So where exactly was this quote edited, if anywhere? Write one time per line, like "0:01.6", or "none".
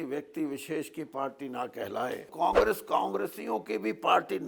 0:02.3